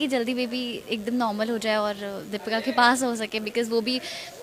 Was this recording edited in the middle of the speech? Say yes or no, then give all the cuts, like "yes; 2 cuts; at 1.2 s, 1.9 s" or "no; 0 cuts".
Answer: no; 0 cuts